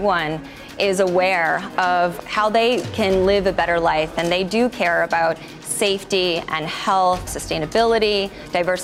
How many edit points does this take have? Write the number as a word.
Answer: two